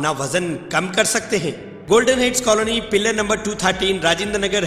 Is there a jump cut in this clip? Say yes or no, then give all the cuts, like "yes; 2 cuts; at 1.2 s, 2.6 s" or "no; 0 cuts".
yes; 1 cut; at 1.7 s